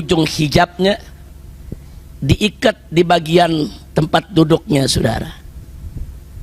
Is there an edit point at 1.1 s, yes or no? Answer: no